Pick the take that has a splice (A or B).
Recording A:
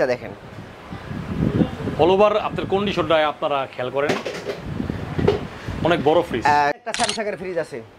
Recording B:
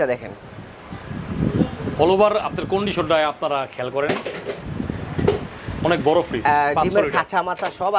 A